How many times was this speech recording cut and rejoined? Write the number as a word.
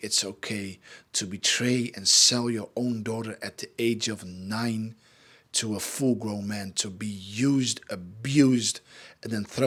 zero